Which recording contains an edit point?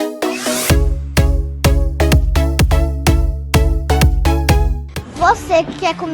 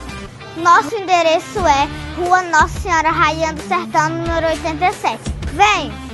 first; 1 cut; at 4.8 s

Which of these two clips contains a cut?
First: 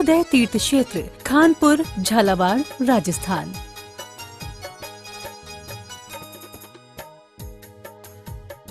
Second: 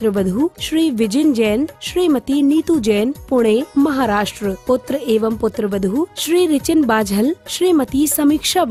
first; 1 cut; at 3.5 s

